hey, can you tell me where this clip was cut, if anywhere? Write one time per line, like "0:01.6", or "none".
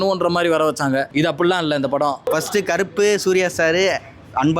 0:01.1
0:02.2